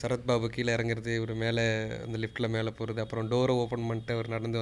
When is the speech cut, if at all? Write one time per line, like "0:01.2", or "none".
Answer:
none